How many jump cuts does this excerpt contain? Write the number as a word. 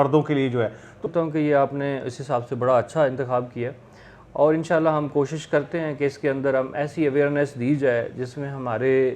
one